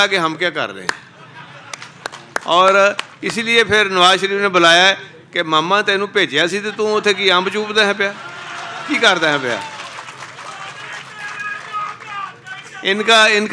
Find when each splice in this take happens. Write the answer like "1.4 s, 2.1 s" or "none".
none